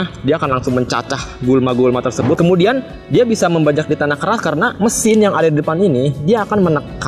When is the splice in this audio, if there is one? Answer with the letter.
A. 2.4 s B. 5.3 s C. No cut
A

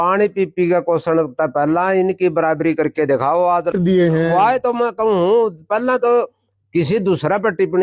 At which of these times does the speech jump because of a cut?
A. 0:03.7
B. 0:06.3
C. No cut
A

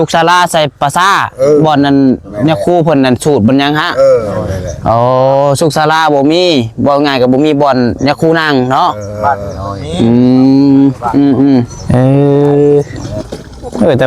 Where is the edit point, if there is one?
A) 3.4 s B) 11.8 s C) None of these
B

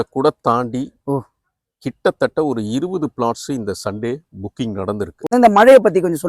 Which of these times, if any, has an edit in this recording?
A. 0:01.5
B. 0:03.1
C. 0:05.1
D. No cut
C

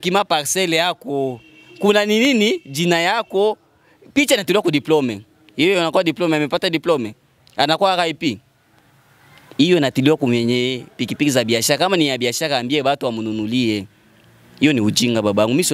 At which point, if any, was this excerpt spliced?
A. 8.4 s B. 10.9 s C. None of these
C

